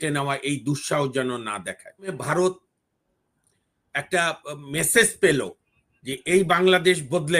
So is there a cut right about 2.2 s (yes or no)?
yes